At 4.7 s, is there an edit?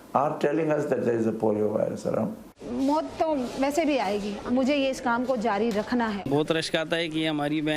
no; 2 cuts; at 2.4 s, 6.2 s

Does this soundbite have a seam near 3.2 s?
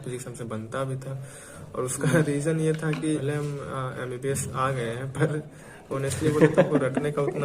yes; 1 cut; at 3.2 s

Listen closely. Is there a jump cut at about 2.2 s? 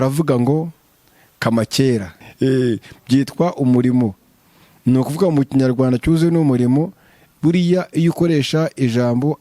yes; 1 cut; at 2.2 s

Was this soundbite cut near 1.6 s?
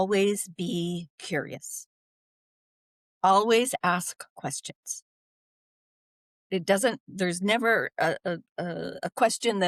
no; 0 cuts

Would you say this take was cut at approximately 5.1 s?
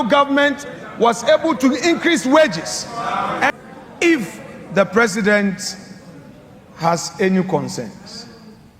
no; 1 cut; at 3.5 s

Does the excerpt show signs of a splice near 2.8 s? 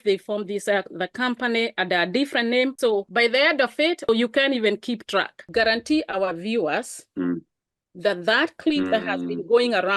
yes; 3 cuts; at 2.8 s, 4.1 s, 5.5 s

